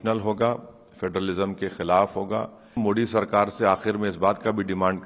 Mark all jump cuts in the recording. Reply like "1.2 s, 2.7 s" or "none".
2.8 s